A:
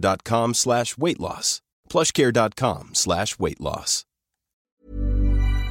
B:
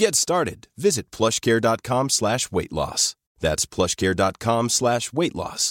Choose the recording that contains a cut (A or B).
A